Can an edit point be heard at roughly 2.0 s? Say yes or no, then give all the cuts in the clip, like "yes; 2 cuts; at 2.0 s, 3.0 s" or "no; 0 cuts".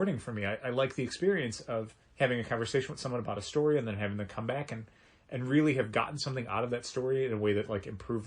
yes; 1 cut; at 2.0 s